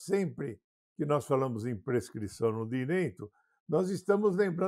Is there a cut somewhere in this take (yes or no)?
no